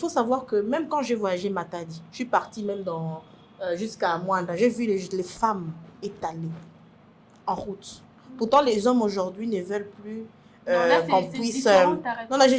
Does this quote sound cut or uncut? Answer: uncut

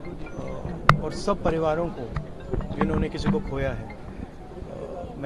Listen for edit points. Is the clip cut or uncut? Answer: uncut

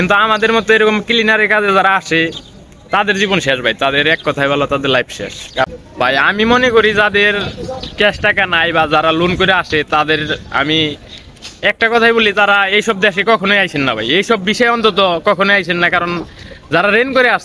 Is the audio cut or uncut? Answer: cut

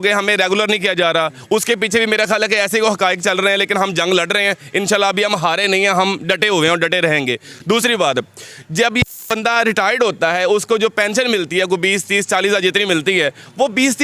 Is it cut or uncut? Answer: uncut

